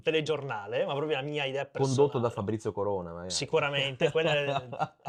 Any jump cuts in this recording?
no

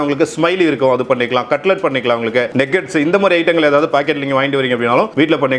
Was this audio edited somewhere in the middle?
no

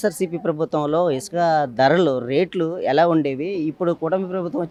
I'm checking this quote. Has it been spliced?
no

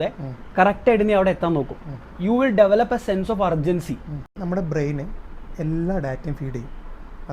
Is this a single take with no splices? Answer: no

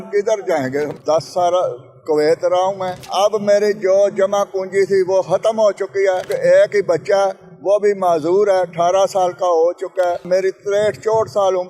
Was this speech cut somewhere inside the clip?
yes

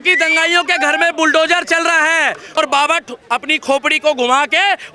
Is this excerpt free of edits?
no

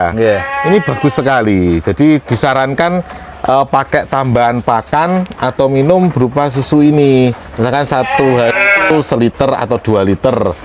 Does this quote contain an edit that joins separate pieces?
no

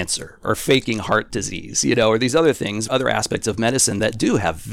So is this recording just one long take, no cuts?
no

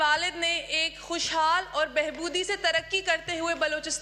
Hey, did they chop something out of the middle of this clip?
no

